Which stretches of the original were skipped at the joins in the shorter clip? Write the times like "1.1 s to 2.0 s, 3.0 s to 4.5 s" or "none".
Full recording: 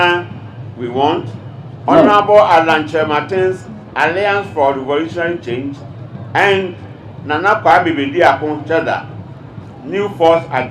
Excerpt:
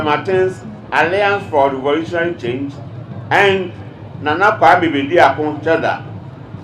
none